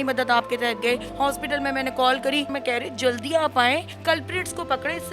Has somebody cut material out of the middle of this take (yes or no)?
yes